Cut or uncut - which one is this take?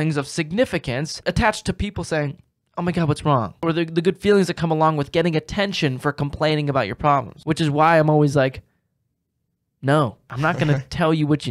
cut